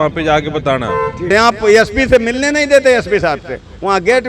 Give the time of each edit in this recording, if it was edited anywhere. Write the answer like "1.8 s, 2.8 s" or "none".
1.3 s